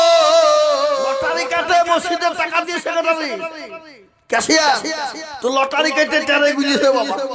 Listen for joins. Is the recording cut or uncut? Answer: cut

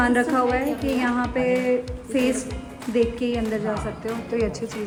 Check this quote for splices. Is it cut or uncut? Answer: uncut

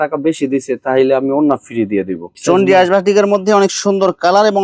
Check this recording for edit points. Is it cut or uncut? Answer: cut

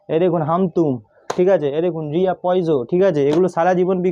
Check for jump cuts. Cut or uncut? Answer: uncut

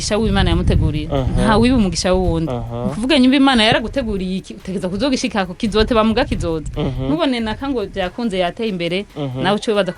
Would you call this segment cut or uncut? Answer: uncut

